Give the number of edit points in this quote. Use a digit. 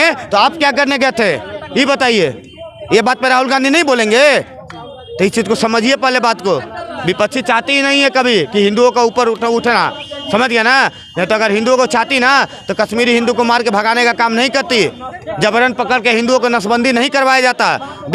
0